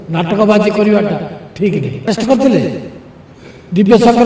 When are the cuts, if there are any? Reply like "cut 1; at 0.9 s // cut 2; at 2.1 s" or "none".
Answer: cut 1; at 2.1 s